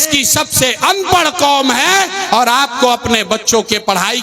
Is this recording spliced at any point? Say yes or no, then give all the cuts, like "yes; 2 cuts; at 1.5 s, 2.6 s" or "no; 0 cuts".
no; 0 cuts